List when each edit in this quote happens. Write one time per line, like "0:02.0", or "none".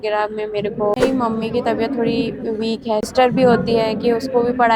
0:01.0
0:03.1